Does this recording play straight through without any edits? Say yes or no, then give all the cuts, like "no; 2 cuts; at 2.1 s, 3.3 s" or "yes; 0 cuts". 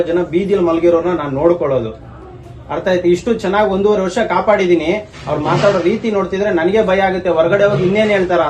yes; 0 cuts